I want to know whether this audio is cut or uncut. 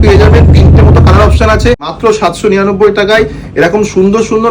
cut